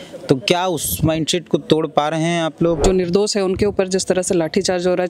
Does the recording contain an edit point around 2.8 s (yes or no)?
yes